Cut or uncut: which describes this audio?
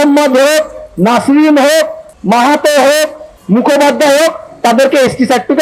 cut